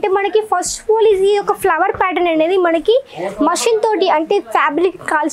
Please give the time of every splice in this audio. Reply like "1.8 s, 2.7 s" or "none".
none